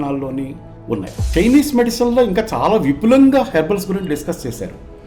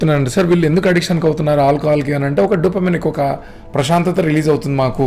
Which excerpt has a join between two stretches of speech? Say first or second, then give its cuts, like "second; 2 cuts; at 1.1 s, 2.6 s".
first; 1 cut; at 1.1 s